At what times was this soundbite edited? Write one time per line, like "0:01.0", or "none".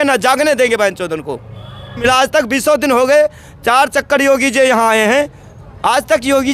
0:02.0